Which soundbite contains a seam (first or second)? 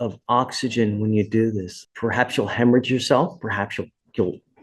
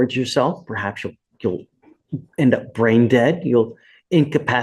first